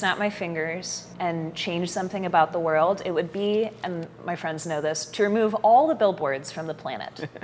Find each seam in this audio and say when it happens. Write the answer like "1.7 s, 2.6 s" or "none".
1.0 s